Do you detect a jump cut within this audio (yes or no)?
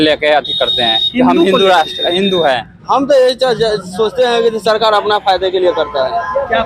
yes